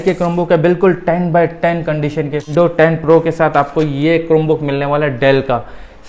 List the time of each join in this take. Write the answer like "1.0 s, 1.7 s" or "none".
2.5 s